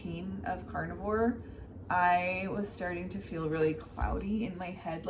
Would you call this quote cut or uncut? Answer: uncut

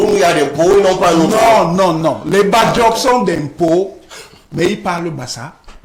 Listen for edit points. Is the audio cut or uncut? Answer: uncut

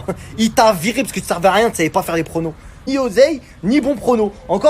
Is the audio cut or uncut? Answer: cut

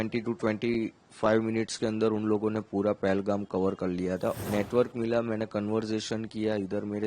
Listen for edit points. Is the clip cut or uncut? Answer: cut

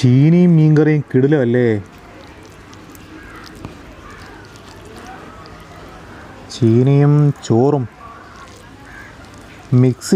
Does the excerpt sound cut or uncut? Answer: uncut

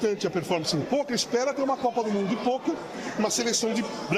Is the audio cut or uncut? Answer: uncut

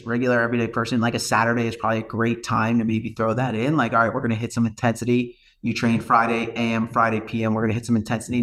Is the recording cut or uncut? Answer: uncut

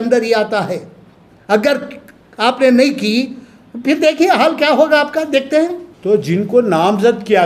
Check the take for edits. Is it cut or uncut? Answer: cut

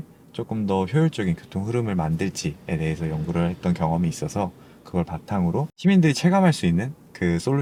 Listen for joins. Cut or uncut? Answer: uncut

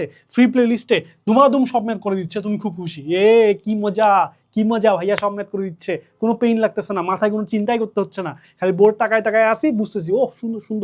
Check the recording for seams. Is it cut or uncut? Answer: uncut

